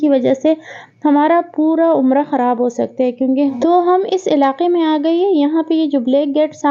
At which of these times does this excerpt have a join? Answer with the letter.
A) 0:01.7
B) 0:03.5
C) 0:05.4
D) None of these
B